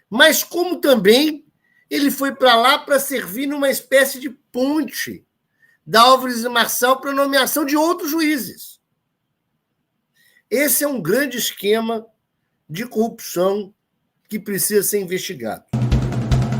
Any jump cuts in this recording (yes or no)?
yes